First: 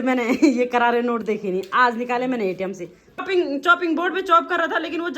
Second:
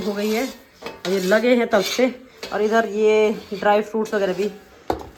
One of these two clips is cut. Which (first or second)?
first